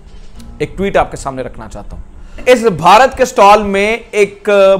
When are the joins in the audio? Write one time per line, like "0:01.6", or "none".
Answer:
0:02.4